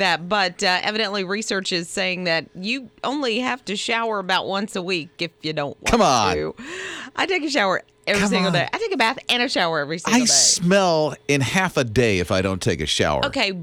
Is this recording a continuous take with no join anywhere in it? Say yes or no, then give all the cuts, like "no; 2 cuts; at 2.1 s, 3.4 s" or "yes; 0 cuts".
yes; 0 cuts